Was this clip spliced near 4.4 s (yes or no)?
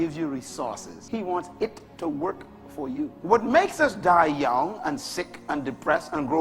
no